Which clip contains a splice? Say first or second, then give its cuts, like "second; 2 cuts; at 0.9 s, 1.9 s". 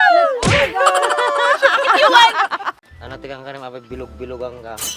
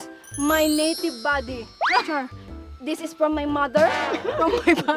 first; 1 cut; at 2.9 s